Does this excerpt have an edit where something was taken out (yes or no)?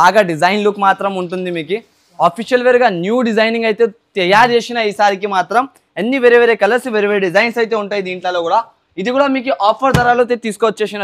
no